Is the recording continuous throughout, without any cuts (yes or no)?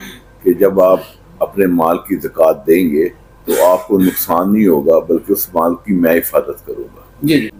yes